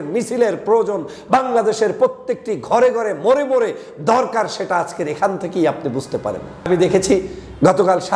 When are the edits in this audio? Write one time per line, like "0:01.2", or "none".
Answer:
0:06.7